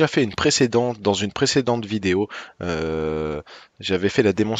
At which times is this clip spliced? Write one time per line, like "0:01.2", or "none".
none